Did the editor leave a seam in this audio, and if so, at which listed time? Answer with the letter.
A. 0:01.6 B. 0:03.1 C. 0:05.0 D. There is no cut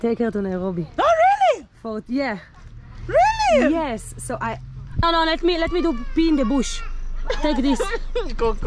C